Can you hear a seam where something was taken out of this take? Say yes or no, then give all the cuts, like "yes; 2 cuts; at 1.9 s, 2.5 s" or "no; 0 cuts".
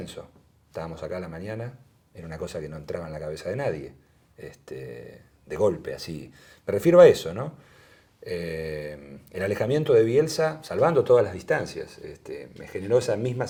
no; 0 cuts